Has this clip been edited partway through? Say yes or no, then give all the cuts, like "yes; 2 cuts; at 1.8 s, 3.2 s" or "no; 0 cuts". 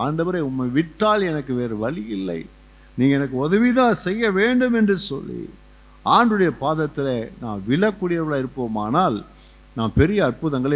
no; 0 cuts